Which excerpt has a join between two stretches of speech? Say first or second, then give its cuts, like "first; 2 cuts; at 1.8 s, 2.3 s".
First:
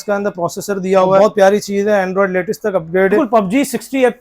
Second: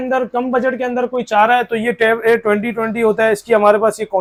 first; 2 cuts; at 1.2 s, 3.2 s